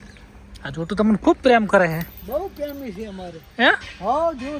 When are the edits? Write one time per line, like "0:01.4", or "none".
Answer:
none